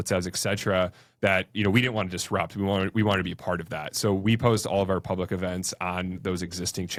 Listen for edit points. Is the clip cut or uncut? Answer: uncut